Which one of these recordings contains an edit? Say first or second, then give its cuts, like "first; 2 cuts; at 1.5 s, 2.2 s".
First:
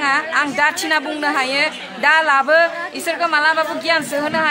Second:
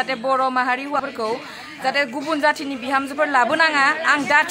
second; 1 cut; at 1.0 s